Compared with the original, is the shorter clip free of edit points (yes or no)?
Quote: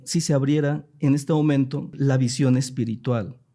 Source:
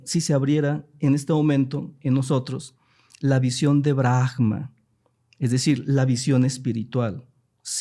no